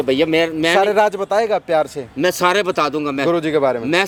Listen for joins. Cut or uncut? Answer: uncut